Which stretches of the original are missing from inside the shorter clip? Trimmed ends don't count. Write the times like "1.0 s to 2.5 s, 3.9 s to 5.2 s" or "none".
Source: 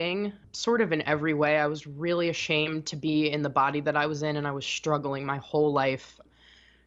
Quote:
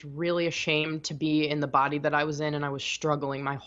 none